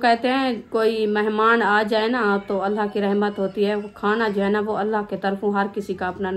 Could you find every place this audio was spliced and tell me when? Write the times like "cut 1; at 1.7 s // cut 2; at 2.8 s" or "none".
none